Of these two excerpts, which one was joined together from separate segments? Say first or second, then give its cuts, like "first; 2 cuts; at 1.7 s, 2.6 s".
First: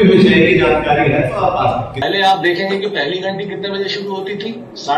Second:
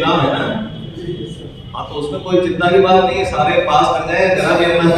first; 1 cut; at 1.9 s